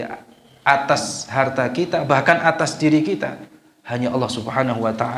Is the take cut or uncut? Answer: uncut